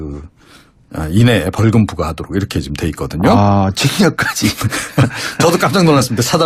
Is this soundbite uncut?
yes; 0 cuts

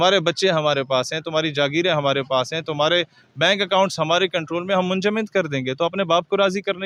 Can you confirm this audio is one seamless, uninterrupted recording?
yes; 0 cuts

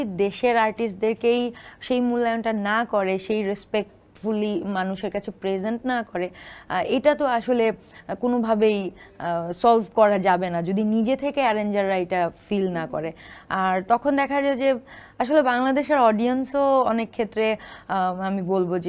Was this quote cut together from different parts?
no; 0 cuts

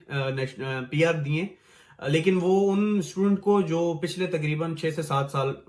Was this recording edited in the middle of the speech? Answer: no; 0 cuts

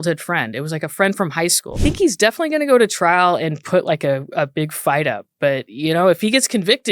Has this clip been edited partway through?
yes; 1 cut; at 1.8 s

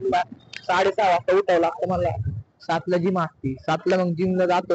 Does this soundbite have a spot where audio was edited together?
no; 0 cuts

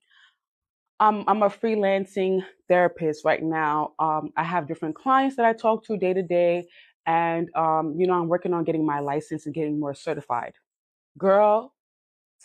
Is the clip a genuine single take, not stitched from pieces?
yes; 0 cuts

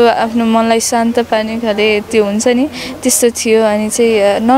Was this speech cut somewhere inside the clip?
no; 0 cuts

